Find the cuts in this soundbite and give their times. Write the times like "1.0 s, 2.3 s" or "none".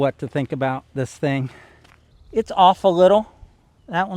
1.6 s

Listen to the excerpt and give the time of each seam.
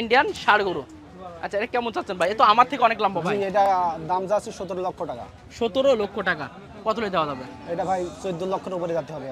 none

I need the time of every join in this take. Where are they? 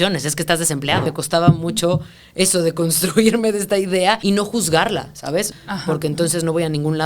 1.1 s, 4.2 s, 5.5 s

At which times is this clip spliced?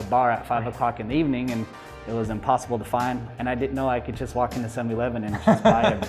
3.3 s

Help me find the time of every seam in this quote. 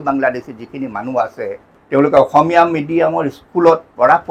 1.7 s

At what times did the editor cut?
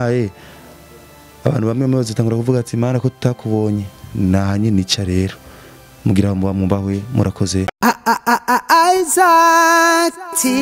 7.7 s

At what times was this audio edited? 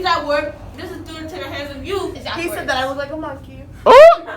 2.2 s

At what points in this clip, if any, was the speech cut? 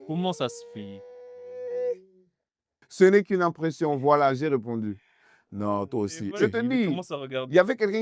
2.8 s, 6.4 s

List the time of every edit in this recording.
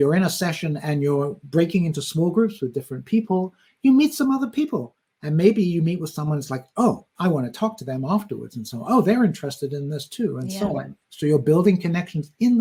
none

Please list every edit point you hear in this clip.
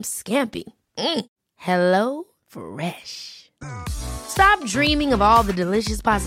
none

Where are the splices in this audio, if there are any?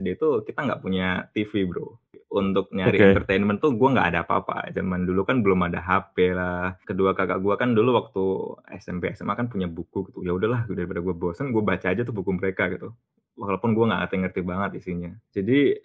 2.2 s, 6.8 s

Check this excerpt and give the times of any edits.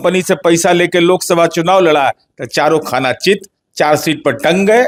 none

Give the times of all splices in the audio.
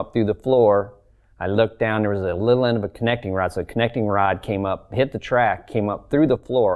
none

